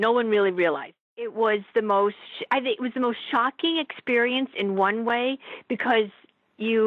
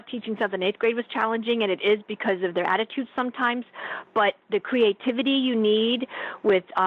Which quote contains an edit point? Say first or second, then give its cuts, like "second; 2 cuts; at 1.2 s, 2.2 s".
first; 2 cuts; at 1.0 s, 2.3 s